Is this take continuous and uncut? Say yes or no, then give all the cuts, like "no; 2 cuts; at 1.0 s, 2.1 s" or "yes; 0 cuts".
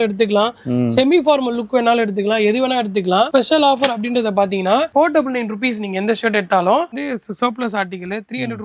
no; 3 cuts; at 3.3 s, 4.9 s, 6.9 s